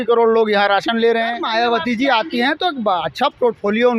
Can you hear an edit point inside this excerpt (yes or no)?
yes